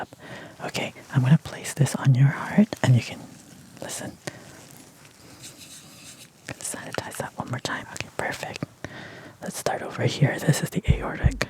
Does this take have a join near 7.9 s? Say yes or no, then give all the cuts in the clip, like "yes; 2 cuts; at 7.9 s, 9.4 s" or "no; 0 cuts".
yes; 1 cut; at 7.9 s